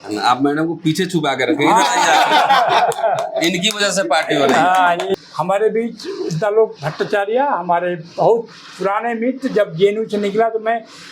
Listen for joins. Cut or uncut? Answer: cut